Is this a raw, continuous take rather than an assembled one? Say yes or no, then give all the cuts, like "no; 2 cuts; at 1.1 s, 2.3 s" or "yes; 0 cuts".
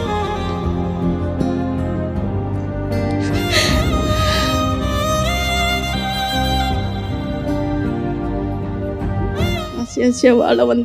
no; 1 cut; at 9.7 s